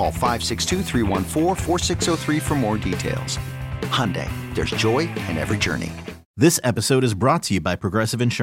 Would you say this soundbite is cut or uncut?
cut